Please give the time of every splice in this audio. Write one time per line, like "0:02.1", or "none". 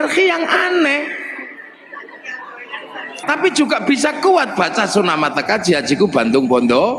0:03.2